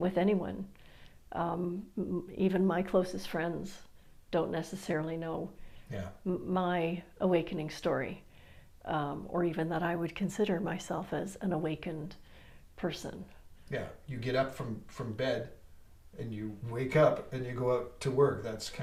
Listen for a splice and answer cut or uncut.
uncut